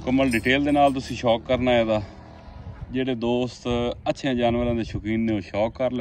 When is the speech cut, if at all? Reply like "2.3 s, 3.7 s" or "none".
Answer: none